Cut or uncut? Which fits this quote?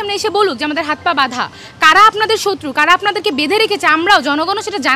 uncut